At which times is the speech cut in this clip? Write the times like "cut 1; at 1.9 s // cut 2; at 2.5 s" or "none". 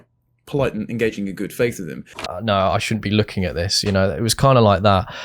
cut 1; at 2.1 s